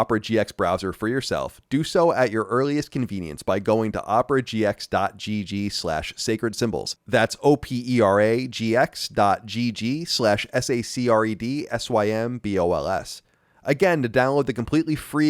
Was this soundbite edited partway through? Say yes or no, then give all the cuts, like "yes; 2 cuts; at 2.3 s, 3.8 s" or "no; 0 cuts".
no; 0 cuts